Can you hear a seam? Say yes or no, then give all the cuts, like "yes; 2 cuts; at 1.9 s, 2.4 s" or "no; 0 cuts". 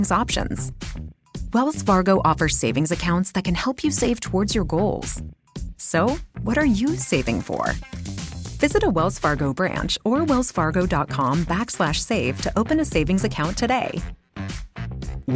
no; 0 cuts